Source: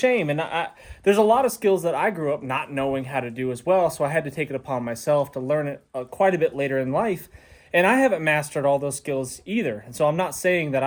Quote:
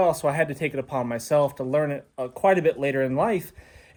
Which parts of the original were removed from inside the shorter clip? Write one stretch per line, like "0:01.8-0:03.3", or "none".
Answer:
none